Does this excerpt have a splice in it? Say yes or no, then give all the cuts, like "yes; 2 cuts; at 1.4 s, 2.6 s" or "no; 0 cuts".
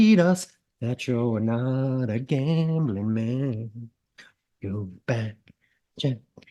no; 0 cuts